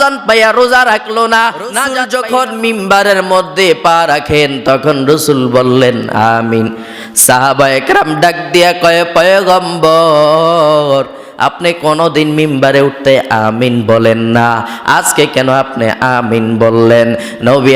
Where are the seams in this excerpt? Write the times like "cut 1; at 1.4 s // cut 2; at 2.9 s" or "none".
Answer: cut 1; at 2.0 s